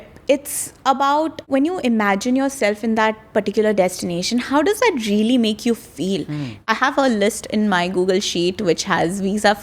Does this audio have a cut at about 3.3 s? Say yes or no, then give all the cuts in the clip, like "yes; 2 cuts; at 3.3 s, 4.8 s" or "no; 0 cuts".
no; 2 cuts; at 1.4 s, 6.7 s